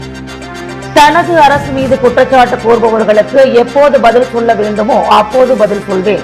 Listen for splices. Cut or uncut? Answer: uncut